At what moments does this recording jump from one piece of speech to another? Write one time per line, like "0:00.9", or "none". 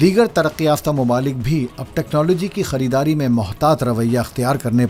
none